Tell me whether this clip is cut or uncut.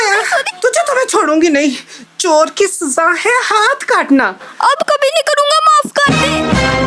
uncut